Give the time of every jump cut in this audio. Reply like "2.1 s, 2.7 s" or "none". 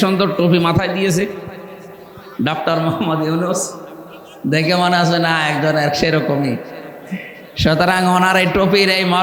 none